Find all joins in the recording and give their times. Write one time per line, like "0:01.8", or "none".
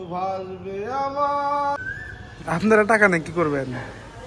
0:01.8